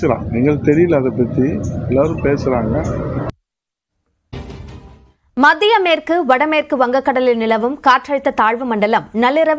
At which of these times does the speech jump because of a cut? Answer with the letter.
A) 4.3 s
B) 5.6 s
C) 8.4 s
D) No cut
A